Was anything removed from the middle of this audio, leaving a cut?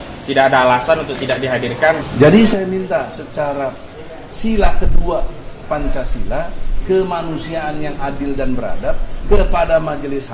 yes; 1 cut; at 2.0 s

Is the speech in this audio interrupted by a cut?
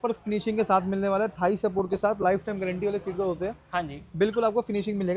no; 0 cuts

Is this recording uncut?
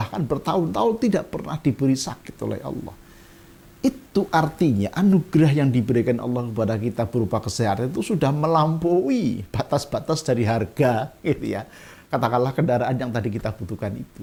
yes; 0 cuts

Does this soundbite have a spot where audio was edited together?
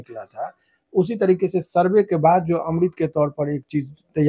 no; 0 cuts

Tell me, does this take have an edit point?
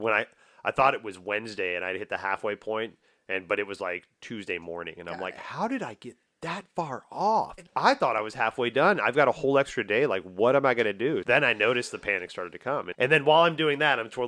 yes; 3 cuts; at 7.6 s, 11.2 s, 12.9 s

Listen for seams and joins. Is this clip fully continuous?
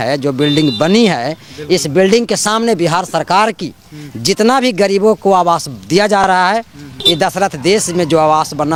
yes; 0 cuts

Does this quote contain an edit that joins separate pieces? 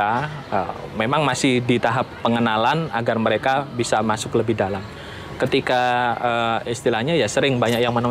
no; 0 cuts

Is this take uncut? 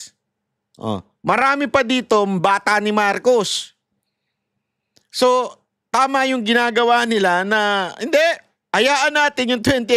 yes; 0 cuts

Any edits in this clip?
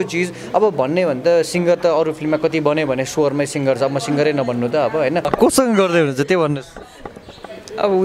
yes; 1 cut; at 5.3 s

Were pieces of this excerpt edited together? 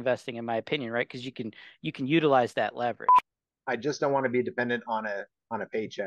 yes; 1 cut; at 3.1 s

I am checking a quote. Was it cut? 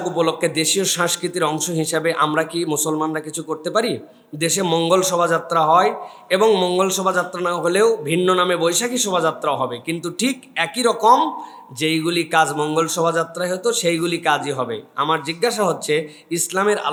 no; 0 cuts

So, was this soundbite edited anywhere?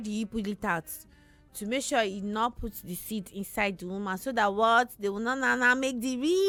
no; 0 cuts

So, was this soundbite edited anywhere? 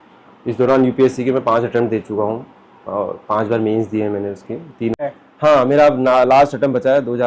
yes; 1 cut; at 4.9 s

